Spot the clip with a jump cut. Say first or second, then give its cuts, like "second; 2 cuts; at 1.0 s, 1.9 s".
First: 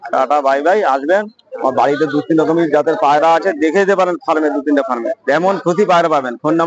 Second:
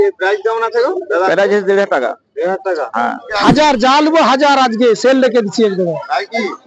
second; 1 cut; at 3.3 s